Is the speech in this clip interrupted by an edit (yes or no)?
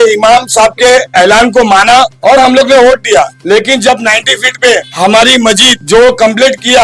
yes